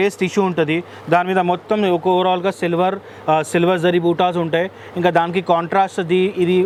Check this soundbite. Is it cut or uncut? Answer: uncut